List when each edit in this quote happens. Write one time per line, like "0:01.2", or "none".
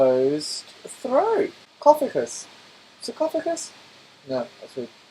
0:01.6